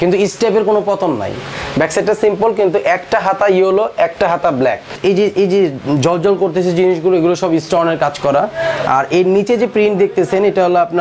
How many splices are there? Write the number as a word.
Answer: two